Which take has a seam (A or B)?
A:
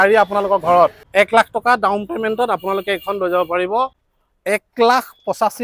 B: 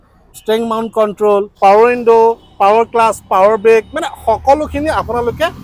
A